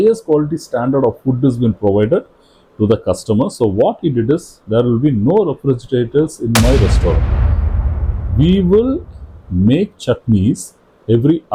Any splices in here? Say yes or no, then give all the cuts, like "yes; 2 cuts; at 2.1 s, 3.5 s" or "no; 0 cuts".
no; 0 cuts